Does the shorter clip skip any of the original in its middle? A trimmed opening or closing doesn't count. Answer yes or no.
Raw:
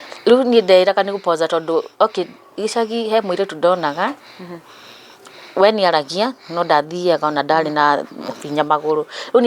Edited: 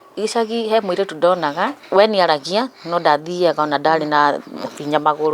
yes